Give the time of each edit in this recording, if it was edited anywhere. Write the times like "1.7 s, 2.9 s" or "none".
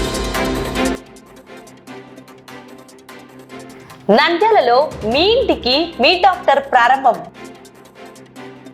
none